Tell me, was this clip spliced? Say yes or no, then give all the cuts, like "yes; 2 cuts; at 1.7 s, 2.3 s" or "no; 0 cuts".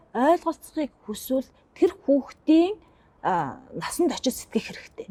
no; 0 cuts